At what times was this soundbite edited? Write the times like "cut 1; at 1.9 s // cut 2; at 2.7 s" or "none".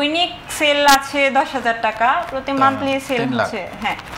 none